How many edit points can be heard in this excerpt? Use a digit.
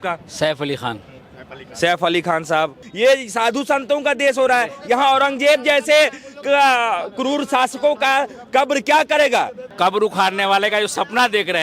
2